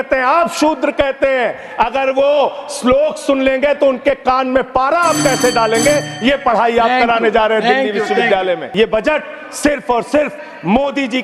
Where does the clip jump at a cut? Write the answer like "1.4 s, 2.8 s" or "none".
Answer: 8.7 s